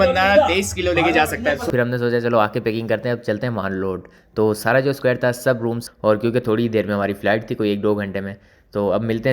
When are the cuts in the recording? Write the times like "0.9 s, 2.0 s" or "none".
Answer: 1.7 s, 5.8 s